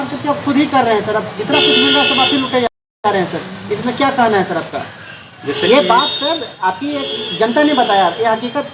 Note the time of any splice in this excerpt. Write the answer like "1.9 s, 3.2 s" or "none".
none

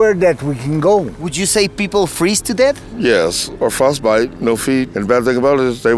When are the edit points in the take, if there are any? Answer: 1.1 s, 4.9 s

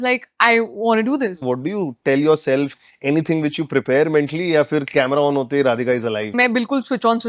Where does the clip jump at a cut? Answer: 1.4 s, 2.8 s, 6.3 s

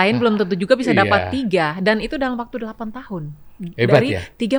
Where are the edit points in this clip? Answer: none

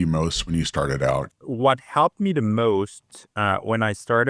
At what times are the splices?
1.3 s

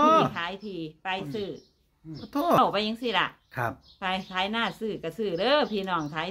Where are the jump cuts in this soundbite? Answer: 2.6 s

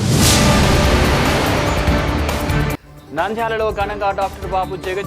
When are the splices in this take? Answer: 2.9 s

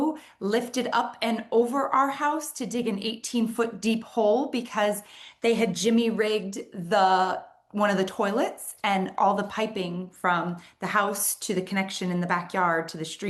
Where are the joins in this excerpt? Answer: none

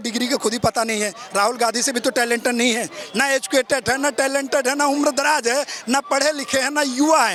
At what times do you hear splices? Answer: none

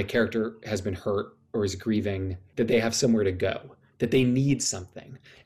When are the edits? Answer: 1.4 s, 2.4 s

